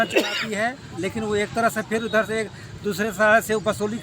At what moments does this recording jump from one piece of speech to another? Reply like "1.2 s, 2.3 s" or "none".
0.9 s